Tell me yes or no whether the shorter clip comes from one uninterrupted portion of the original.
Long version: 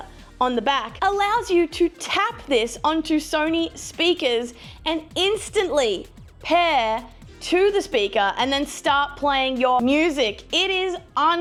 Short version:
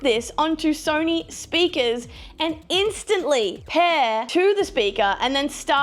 no